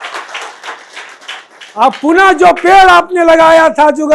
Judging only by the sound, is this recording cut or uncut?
uncut